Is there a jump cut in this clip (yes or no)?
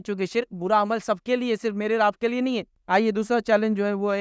yes